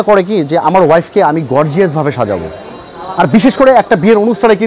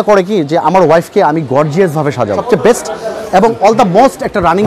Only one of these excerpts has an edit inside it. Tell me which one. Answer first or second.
second